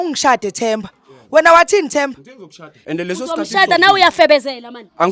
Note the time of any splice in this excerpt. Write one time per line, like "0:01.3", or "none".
none